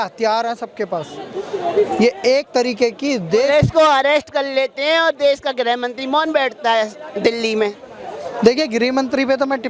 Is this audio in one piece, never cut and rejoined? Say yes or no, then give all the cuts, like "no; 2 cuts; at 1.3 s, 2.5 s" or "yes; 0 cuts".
yes; 0 cuts